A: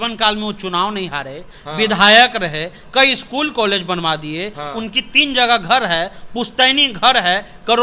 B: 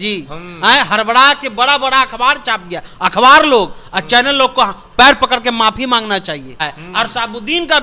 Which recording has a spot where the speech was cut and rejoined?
B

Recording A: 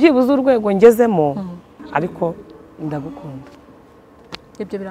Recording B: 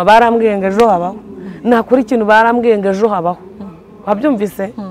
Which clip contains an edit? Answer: A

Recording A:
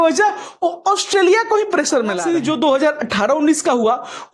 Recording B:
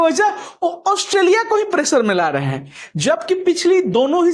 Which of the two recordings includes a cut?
A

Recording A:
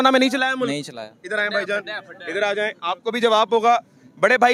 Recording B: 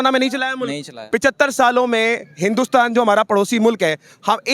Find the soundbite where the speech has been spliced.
B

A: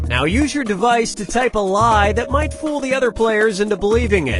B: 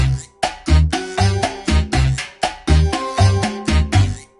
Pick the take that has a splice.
B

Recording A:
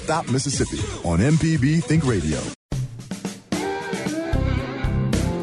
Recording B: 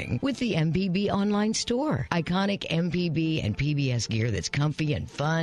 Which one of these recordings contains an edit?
A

